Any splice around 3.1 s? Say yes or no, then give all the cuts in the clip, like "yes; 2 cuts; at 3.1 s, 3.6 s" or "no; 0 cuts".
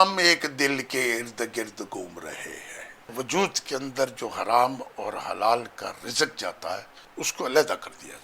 yes; 2 cuts; at 3.1 s, 7.0 s